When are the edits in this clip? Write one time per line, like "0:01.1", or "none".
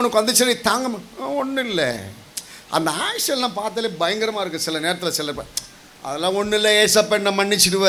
none